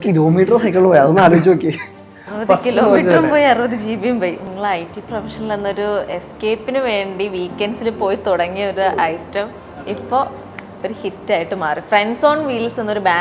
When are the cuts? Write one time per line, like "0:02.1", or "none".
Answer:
0:04.4